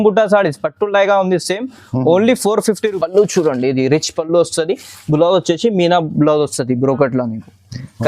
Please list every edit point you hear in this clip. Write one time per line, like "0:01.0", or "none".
0:03.0